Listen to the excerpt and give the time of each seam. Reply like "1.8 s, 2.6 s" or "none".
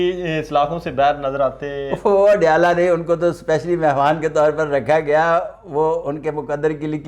none